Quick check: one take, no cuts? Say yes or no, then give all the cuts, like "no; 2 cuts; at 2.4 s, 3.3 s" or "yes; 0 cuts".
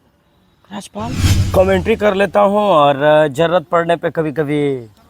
no; 1 cut; at 1.3 s